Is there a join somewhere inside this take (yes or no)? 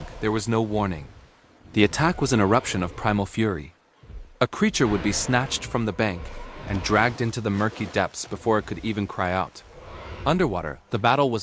no